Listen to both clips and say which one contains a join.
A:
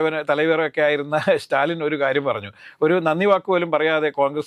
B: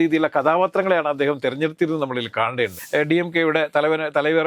B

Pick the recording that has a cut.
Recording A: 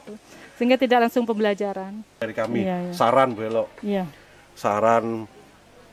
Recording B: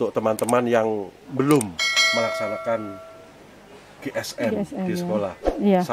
A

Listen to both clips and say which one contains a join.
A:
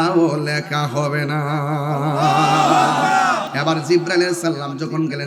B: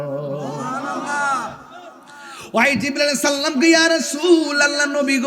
A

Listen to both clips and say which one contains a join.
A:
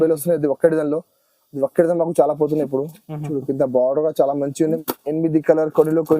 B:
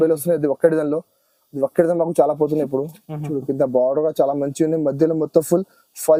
A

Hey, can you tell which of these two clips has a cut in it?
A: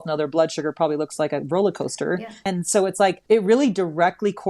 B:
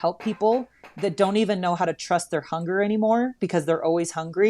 A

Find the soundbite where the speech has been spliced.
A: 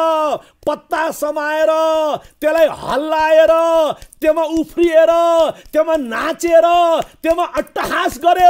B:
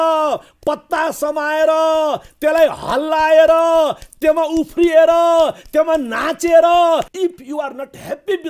B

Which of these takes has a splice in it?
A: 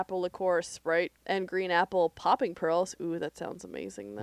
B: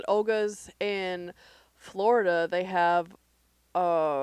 A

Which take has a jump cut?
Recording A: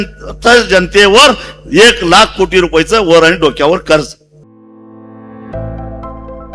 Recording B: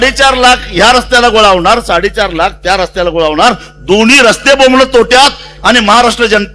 A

